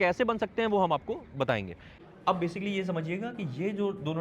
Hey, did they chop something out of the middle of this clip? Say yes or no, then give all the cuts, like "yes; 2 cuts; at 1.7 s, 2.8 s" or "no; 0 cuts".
yes; 1 cut; at 1.9 s